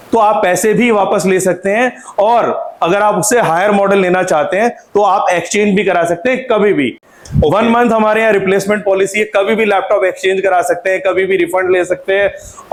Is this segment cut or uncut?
uncut